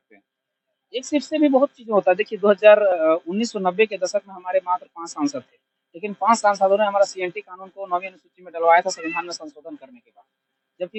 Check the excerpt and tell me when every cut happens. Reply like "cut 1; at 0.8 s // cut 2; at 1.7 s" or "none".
none

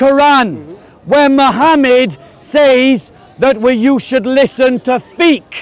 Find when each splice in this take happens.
none

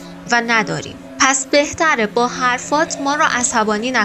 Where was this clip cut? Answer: cut 1; at 1.0 s

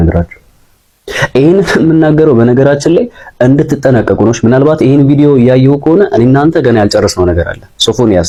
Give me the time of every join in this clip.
none

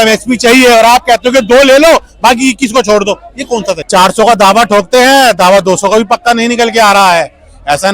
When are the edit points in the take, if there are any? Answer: cut 1; at 3.8 s

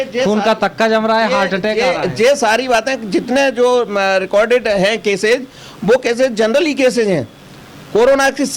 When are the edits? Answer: none

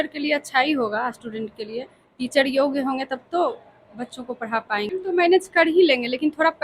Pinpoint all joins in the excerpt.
cut 1; at 4.9 s

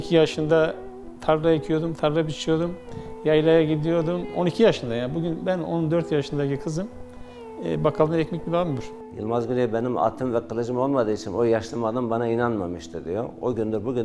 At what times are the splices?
cut 1; at 4.3 s // cut 2; at 8.9 s

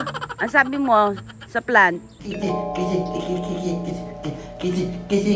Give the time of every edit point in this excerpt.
cut 1; at 2.1 s

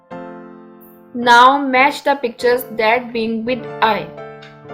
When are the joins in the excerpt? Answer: cut 1; at 1.1 s // cut 2; at 4.0 s

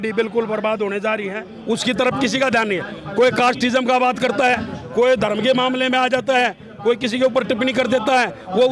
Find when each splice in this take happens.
cut 1; at 1.5 s

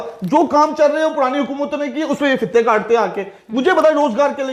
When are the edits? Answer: none

